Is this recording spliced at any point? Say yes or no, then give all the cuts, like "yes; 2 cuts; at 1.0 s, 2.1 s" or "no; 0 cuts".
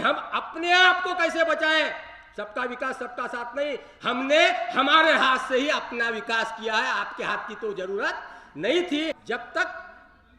yes; 1 cut; at 9.2 s